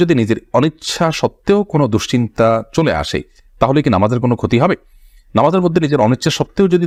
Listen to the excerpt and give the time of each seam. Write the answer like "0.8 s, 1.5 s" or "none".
none